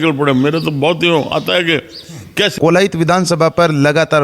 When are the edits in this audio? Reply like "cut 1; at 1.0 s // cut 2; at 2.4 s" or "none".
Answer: cut 1; at 2.5 s